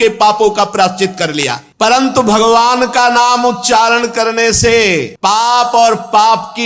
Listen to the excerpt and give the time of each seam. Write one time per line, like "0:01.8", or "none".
0:01.7